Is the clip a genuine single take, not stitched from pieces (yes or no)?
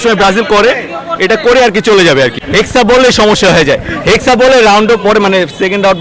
no